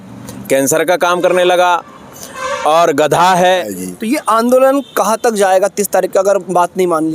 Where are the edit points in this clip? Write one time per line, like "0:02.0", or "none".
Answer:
0:03.7